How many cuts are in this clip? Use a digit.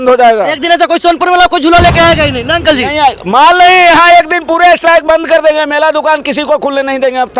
0